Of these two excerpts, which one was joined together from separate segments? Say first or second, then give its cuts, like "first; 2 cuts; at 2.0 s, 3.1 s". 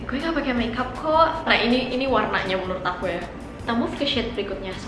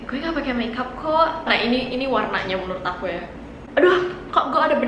second; 1 cut; at 3.6 s